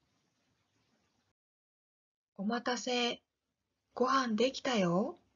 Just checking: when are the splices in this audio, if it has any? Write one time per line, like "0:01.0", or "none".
0:04.5